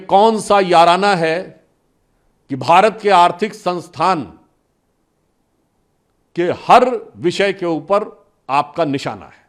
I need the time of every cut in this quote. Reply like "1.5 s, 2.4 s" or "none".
none